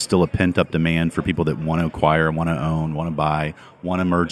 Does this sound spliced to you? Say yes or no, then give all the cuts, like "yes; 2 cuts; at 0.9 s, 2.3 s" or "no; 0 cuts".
no; 0 cuts